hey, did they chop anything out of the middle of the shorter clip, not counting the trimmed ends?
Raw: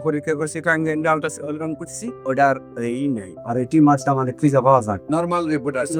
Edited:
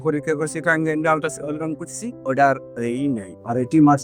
no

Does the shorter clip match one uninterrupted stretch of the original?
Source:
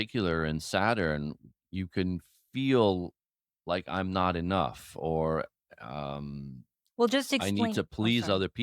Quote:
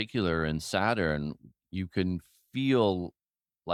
yes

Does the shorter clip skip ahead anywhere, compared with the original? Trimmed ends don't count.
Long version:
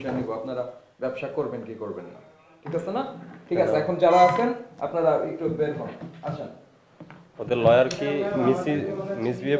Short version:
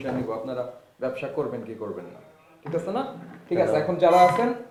no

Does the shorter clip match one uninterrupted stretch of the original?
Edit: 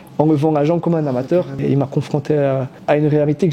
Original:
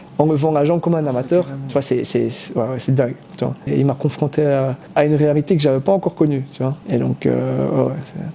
no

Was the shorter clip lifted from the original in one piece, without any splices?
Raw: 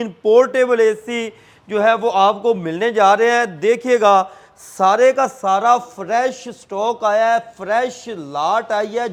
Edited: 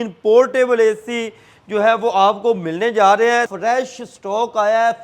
no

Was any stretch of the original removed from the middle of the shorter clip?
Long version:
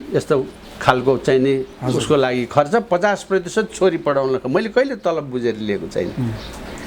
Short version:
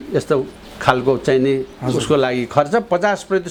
no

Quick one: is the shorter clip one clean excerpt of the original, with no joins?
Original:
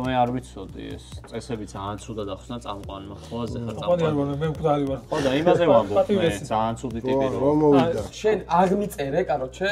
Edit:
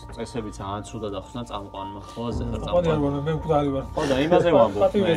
yes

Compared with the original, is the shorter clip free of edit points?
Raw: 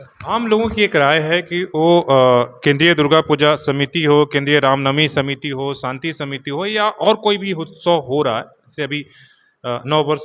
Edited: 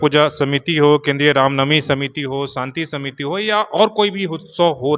yes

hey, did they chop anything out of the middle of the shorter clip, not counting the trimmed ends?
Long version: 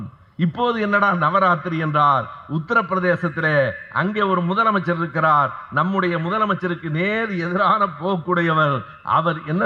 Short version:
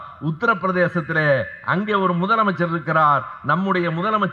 no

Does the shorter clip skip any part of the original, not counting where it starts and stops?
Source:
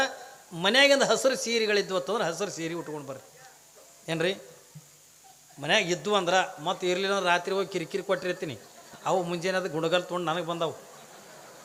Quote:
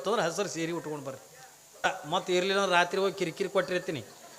yes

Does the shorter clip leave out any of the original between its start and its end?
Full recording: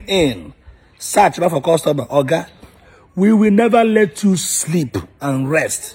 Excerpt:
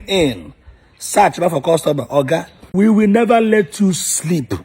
yes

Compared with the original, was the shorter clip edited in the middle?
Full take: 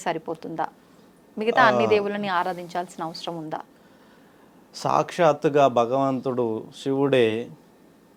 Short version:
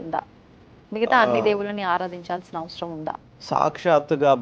yes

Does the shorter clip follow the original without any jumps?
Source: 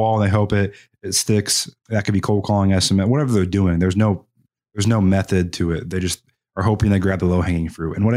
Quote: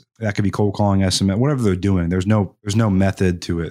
no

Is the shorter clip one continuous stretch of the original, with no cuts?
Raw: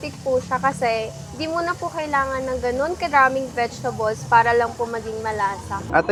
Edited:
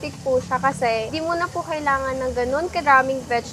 no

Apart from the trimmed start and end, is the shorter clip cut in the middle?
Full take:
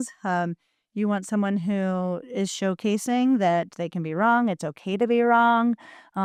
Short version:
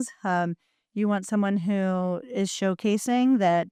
no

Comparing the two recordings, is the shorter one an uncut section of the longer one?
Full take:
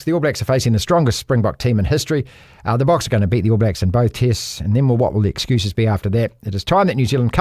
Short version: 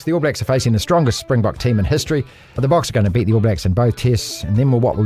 no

